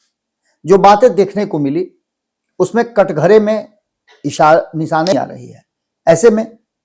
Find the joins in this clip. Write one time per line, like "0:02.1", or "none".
0:05.1

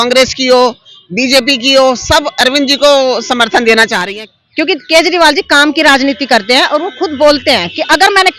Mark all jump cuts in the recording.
0:04.0

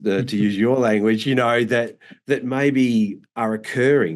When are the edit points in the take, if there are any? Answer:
none

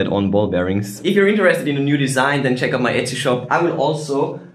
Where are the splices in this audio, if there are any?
0:01.0
0:03.4

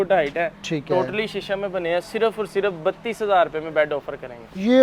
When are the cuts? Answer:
none

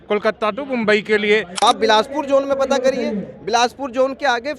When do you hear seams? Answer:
0:01.5

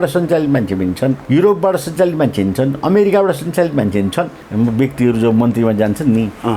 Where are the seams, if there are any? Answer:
0:01.2
0:04.4

